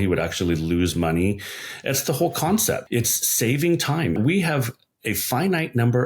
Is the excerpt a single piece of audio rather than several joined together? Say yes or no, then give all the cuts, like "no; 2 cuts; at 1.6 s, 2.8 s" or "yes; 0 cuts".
no; 2 cuts; at 2.8 s, 4.2 s